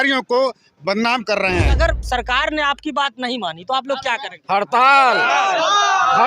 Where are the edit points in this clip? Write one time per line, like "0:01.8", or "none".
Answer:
0:01.8